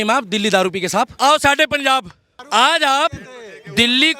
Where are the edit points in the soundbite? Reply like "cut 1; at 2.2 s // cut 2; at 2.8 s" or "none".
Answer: cut 1; at 1.1 s // cut 2; at 2.3 s